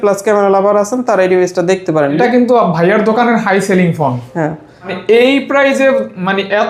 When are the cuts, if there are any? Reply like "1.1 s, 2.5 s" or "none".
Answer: 2.2 s, 4.9 s